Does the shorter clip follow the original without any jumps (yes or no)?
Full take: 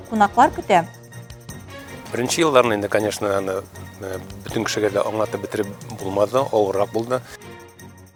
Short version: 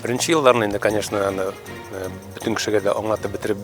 yes